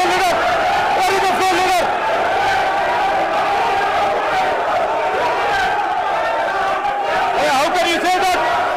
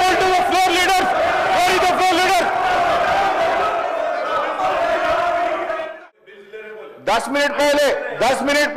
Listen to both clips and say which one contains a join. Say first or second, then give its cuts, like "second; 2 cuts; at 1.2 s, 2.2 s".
second; 1 cut; at 6.0 s